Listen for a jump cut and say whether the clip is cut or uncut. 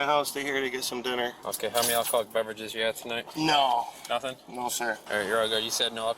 cut